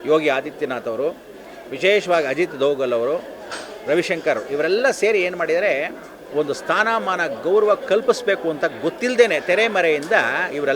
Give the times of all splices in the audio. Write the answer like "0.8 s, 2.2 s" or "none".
6.3 s